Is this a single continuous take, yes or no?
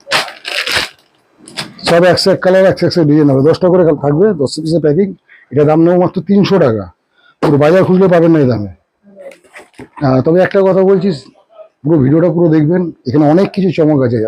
yes